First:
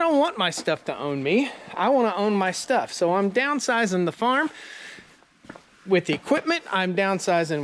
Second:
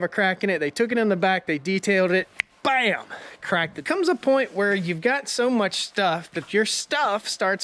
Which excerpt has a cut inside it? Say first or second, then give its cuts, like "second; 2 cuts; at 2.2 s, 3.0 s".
second; 1 cut; at 3.7 s